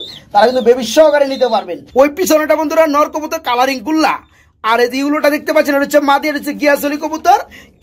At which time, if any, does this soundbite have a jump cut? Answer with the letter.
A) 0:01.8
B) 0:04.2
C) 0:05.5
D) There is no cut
A